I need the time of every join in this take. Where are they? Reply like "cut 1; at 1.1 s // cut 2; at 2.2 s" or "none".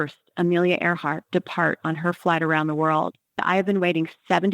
cut 1; at 3.4 s